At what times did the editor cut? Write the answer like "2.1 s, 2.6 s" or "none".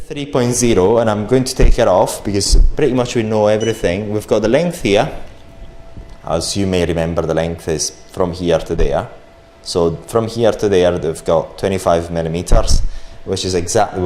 none